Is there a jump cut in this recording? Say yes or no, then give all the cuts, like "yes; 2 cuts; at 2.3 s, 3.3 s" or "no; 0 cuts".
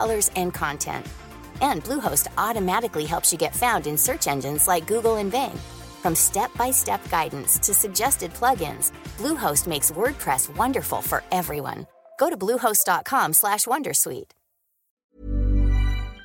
yes; 1 cut; at 15.1 s